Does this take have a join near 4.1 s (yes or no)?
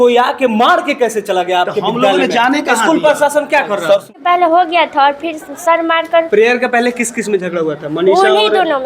yes